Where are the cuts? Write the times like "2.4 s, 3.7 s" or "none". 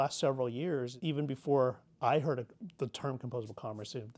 0.9 s